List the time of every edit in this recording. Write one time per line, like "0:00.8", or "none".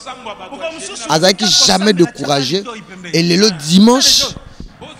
0:01.1